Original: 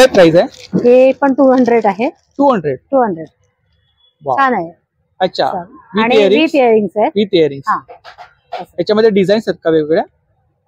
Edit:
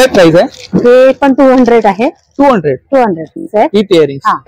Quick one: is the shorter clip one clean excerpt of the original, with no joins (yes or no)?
no